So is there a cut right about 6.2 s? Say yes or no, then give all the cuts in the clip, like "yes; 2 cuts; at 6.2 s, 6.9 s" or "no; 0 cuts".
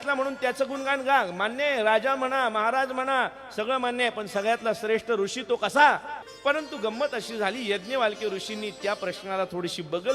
yes; 1 cut; at 6.2 s